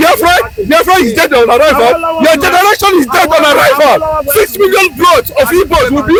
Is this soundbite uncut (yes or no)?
yes